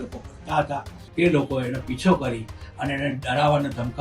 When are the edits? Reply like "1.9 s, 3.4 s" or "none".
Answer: 1.0 s